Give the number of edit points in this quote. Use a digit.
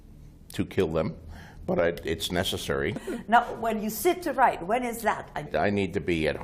2